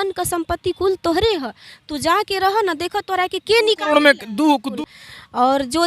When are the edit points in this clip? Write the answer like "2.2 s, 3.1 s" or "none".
4.7 s